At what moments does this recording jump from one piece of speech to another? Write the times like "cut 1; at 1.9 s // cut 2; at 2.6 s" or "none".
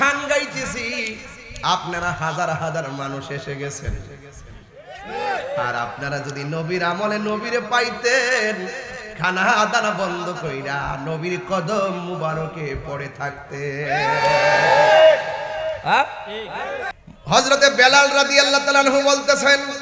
cut 1; at 16.8 s